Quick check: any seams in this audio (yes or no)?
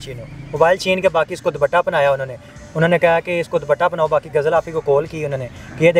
no